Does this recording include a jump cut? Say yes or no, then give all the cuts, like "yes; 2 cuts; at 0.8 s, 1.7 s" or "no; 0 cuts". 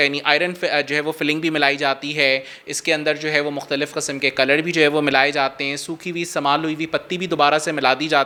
no; 0 cuts